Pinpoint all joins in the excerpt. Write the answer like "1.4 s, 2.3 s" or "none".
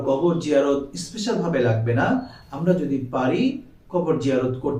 none